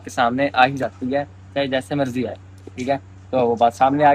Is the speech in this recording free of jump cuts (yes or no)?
yes